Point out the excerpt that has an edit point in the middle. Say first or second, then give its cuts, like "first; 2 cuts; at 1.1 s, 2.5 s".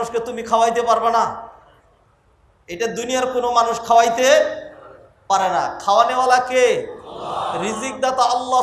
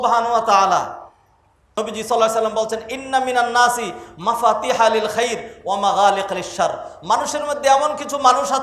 second; 1 cut; at 1.6 s